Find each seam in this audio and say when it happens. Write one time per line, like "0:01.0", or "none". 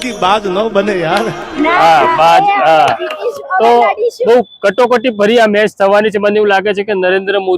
0:01.5